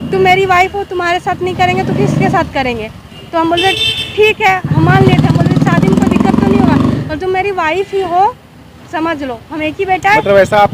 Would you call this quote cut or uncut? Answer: uncut